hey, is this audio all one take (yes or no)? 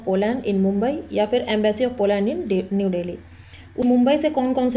no